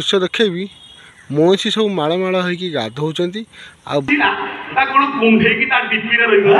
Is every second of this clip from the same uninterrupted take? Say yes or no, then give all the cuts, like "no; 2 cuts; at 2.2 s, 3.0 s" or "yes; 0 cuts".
no; 1 cut; at 4.1 s